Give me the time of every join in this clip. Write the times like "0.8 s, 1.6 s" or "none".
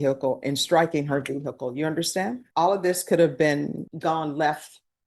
2.4 s, 3.9 s